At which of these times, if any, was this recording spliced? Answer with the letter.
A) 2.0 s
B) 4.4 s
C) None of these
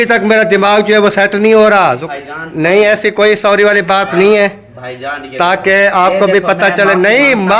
A